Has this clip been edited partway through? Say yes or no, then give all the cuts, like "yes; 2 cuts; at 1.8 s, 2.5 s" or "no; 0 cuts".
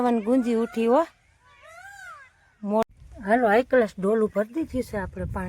yes; 1 cut; at 2.8 s